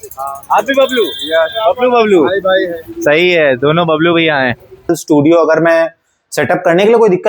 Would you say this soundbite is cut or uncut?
cut